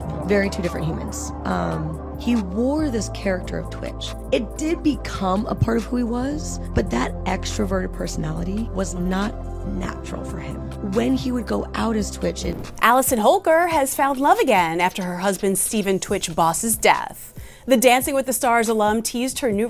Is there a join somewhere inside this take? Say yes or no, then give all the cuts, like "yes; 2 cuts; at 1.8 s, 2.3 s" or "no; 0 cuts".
yes; 1 cut; at 12.5 s